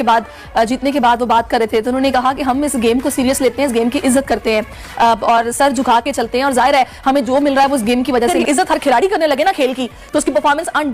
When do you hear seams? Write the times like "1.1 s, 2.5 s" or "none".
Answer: 8.4 s